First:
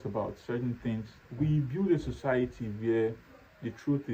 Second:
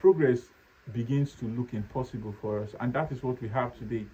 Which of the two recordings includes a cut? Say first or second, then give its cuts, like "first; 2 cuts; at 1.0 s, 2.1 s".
first; 1 cut; at 1.2 s